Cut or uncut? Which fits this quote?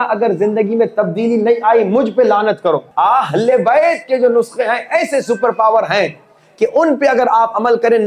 cut